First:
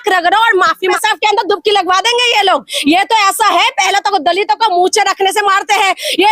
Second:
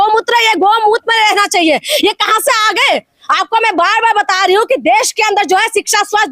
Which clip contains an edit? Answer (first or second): first